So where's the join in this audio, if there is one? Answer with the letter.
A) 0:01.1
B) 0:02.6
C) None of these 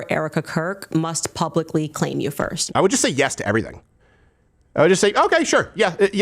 B